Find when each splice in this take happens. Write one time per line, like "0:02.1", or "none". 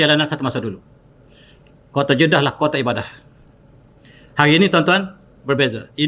none